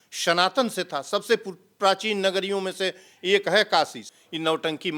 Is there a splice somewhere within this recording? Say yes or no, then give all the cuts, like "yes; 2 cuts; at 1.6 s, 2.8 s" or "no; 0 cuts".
yes; 1 cut; at 4.0 s